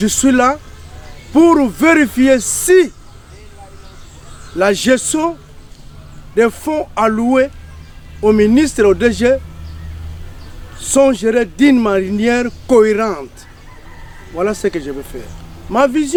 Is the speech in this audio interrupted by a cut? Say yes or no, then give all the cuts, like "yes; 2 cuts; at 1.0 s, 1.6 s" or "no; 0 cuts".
no; 0 cuts